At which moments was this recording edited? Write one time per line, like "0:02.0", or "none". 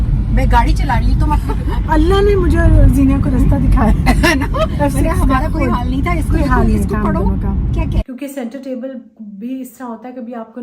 0:08.0